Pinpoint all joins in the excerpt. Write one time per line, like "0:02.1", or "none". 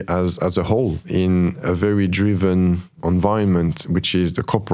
0:01.1
0:03.0